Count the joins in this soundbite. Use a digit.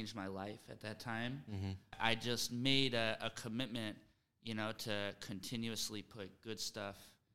1